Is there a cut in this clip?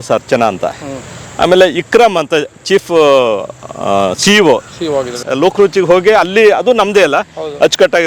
yes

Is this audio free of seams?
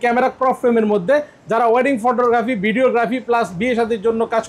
yes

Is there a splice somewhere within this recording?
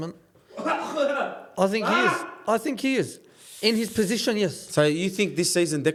no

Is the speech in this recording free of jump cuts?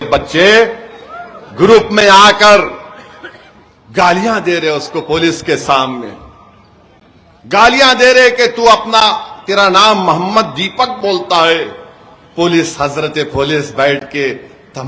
yes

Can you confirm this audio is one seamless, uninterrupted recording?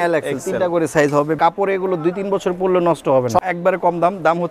no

